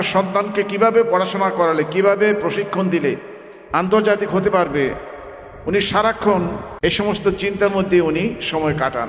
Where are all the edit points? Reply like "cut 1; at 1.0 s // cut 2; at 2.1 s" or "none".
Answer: cut 1; at 6.7 s